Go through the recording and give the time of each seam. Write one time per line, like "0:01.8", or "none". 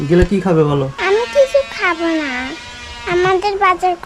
0:00.9